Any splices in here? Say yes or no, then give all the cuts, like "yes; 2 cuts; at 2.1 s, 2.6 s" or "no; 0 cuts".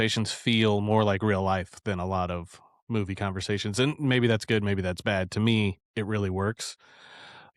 no; 0 cuts